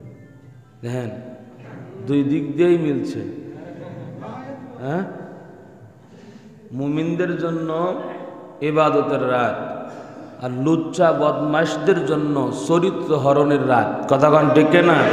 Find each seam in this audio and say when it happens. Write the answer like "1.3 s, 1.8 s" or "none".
none